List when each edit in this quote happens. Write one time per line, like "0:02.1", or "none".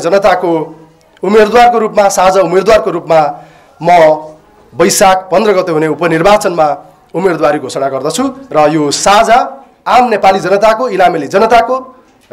none